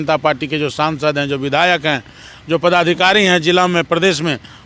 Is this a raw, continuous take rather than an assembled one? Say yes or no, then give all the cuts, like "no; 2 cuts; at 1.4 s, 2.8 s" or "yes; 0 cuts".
yes; 0 cuts